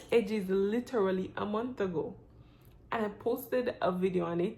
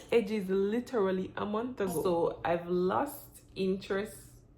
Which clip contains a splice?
second; 1 cut; at 2.0 s

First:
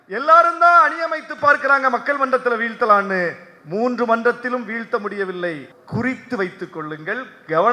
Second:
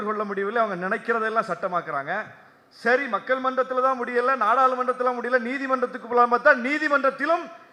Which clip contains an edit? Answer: first; 1 cut; at 5.7 s

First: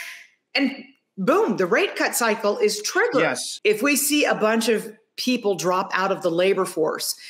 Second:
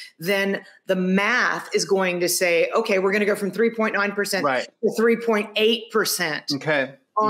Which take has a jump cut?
first; 1 cut; at 3.5 s

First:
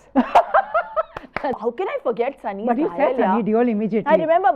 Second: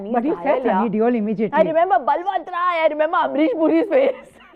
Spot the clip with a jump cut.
first; 1 cut; at 1.6 s

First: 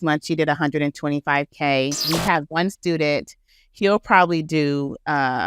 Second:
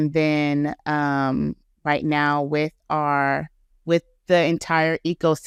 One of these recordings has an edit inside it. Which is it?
first; 2 cuts; at 2.0 s, 3.5 s

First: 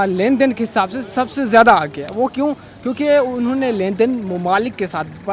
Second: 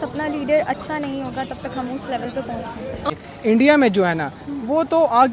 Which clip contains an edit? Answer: second; 1 cut; at 3.2 s

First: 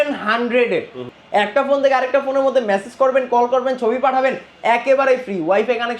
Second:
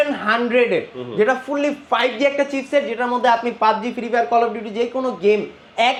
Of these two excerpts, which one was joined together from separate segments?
first; 1 cut; at 1.0 s

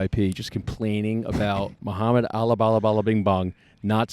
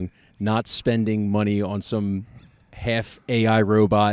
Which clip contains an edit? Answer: first; 1 cut; at 1.8 s

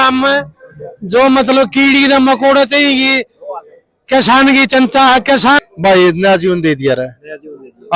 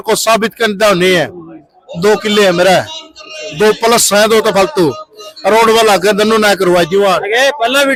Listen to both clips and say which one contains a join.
first; 1 cut; at 5.6 s

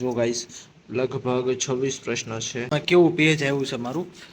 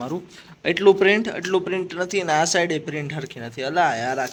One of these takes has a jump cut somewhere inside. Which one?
first; 1 cut; at 2.7 s

